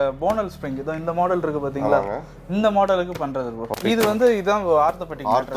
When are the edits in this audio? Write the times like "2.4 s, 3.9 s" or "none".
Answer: 3.6 s